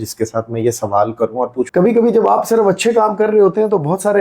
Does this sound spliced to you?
yes; 1 cut; at 1.7 s

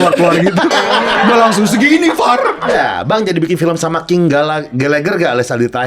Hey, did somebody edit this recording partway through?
yes; 1 cut; at 2.7 s

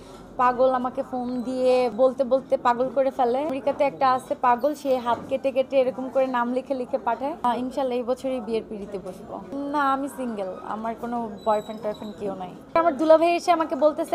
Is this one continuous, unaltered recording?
no; 4 cuts; at 1.9 s, 3.6 s, 7.4 s, 12.8 s

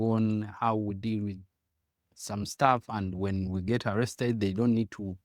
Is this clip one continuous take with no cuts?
yes; 0 cuts

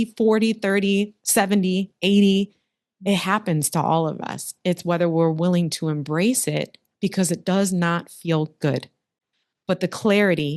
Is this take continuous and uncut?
yes; 0 cuts

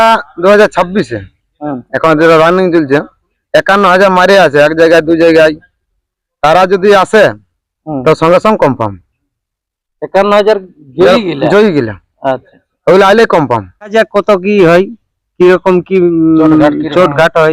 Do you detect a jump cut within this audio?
yes; 1 cut; at 13.9 s

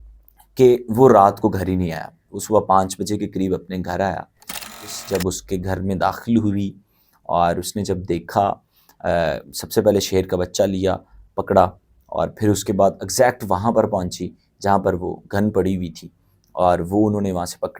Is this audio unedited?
no; 1 cut; at 4.9 s

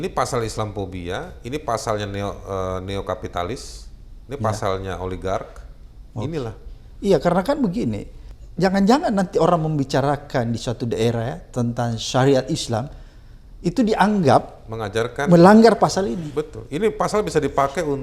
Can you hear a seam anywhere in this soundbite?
no; 0 cuts

